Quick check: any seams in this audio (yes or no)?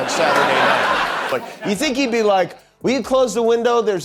yes